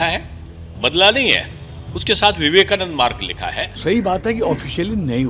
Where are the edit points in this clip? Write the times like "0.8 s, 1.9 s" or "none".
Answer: 3.7 s